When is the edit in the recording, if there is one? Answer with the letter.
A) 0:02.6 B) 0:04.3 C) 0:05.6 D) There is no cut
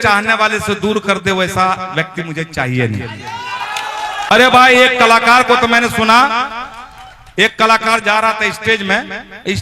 B